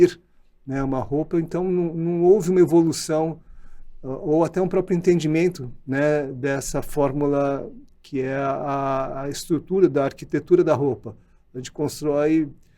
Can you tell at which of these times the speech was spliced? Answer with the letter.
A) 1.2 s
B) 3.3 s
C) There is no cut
C